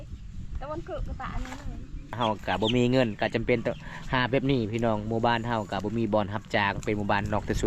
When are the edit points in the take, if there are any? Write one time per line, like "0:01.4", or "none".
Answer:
0:02.2

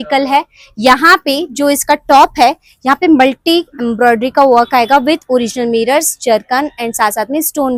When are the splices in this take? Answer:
none

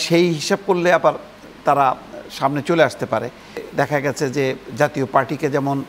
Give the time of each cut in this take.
0:03.7

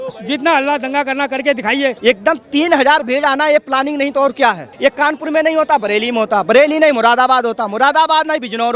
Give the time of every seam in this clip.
0:02.0
0:04.7

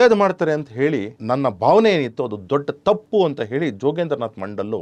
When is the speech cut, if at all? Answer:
0:01.1

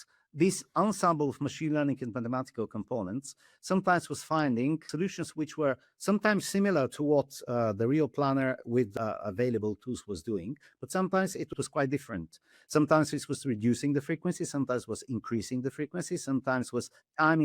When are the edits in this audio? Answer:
0:04.9
0:08.9
0:11.5

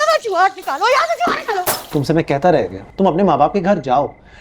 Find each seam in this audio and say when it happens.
0:01.8
0:02.9

